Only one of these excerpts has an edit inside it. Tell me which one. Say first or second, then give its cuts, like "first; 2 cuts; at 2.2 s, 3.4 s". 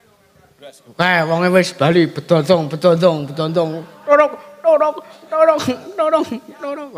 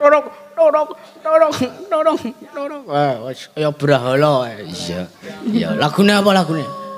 second; 1 cut; at 5.3 s